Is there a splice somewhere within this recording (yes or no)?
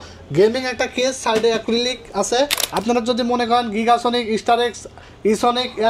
yes